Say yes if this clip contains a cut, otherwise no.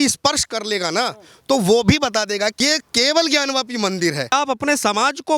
yes